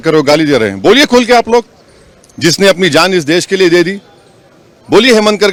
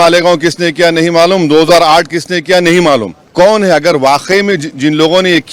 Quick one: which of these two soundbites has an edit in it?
second; 1 cut; at 3.2 s

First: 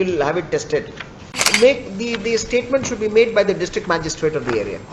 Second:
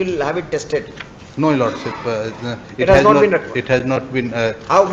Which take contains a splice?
first; 1 cut; at 1.3 s

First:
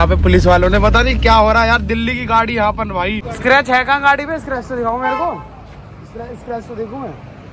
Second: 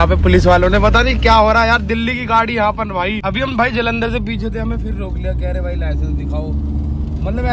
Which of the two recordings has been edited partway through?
first; 1 cut; at 3.2 s

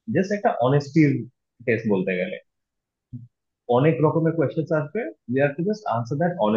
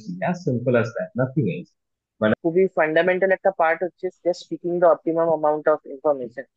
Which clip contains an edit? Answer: second; 1 cut; at 2.3 s

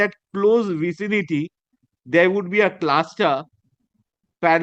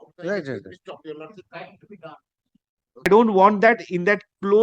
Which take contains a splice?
second; 1 cut; at 3.1 s

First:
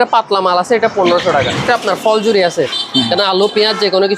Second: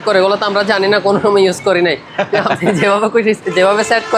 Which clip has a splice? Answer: first; 1 cut; at 1.6 s

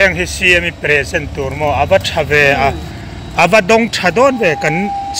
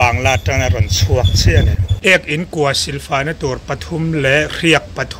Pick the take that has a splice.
second; 1 cut; at 1.8 s

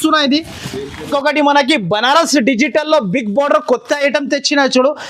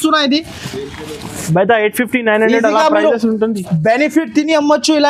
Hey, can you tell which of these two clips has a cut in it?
first; 1 cut; at 1.0 s

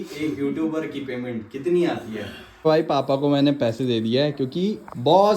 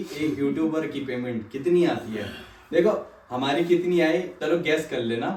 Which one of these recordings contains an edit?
first; 1 cut; at 2.5 s

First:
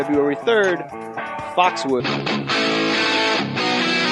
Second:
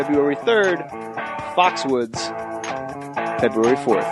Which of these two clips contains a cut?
second; 1 cut; at 2.0 s

